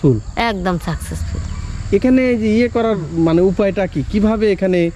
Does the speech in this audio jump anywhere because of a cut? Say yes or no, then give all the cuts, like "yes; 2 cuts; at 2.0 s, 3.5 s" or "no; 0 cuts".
no; 0 cuts